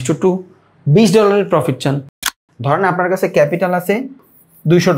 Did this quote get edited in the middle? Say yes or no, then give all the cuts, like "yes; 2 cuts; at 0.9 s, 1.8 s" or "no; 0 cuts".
yes; 1 cut; at 2.3 s